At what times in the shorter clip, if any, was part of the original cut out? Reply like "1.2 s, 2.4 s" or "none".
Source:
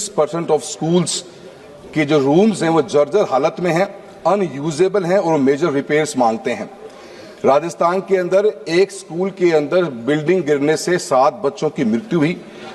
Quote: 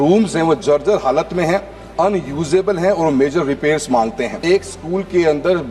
4.4 s